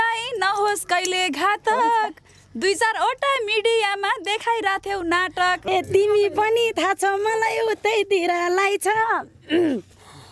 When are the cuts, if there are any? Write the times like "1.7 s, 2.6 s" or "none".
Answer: 5.7 s